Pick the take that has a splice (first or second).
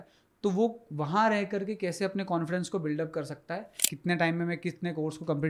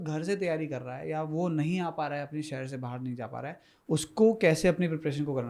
first